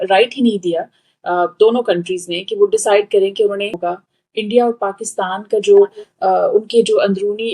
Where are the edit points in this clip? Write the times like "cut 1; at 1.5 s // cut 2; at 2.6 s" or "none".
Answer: cut 1; at 3.8 s